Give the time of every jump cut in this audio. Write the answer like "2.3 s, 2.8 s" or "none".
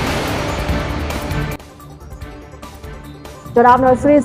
2.8 s